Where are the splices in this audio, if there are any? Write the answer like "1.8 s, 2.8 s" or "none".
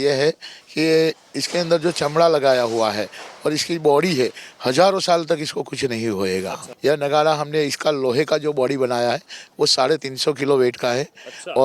6.6 s

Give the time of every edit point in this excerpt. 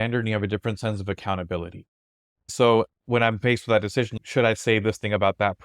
2.5 s, 4.1 s

